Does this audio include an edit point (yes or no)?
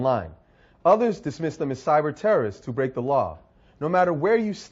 no